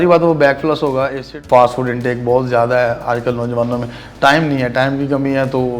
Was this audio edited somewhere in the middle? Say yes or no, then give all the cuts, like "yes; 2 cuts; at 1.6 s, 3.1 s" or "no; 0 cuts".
yes; 1 cut; at 1.3 s